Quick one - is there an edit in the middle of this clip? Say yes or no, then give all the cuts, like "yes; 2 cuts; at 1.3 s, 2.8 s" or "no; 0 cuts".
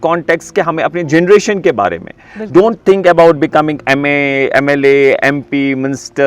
no; 0 cuts